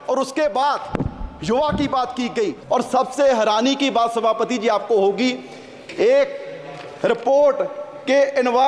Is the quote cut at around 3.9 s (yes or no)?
no